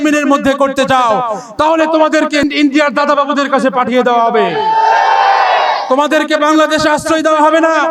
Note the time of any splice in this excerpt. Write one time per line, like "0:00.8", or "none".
none